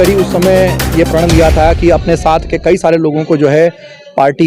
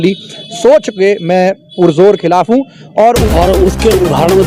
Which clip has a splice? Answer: second; 1 cut; at 3.2 s

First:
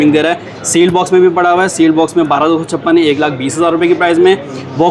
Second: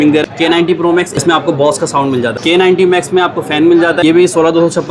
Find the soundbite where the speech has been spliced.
second; 3 cuts; at 0.7 s, 2.4 s, 4.0 s

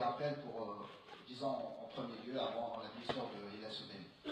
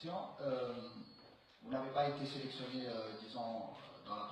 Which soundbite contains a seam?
first; 1 cut; at 2.8 s

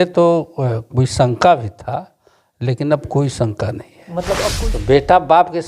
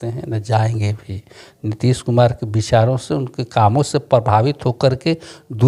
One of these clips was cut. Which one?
first; 1 cut; at 4.5 s

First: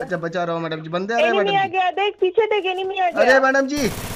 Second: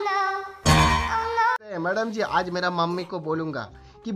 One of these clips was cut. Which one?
second; 1 cut; at 1.7 s

